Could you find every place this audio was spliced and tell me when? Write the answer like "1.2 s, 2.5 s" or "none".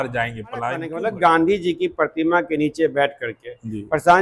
0.9 s

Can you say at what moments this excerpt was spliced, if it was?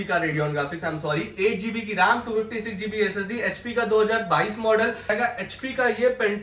5.1 s

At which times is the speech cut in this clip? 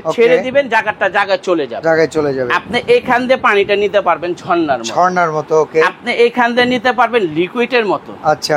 none

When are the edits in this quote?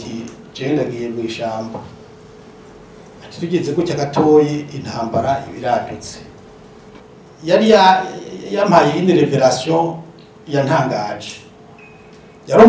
7.0 s

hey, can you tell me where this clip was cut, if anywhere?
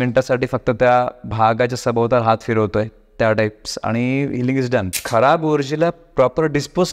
5.0 s

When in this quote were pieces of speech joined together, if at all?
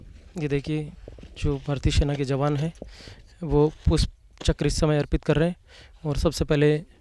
none

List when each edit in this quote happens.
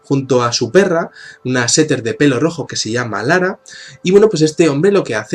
4.3 s

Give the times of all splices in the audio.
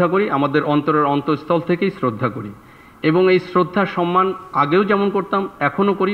none

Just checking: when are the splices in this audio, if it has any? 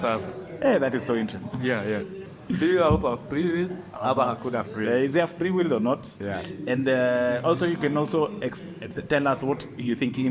2.2 s

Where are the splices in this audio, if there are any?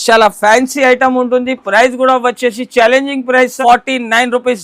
3.5 s

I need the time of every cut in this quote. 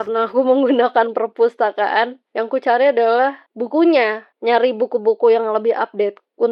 none

